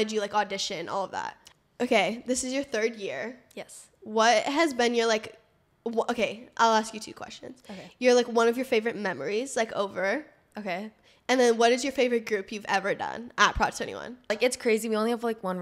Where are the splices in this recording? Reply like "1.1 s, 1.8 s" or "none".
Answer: 1.4 s, 14.3 s